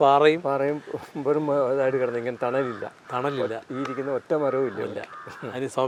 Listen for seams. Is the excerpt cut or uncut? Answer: uncut